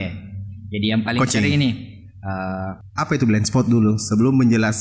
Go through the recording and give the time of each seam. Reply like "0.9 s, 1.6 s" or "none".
2.8 s